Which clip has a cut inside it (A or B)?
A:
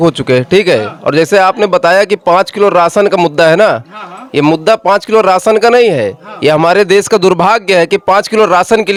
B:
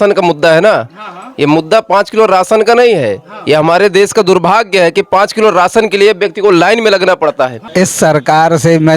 B